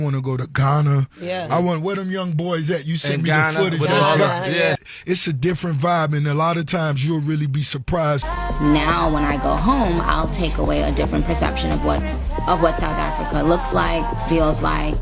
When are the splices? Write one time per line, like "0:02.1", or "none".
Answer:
0:04.8
0:08.2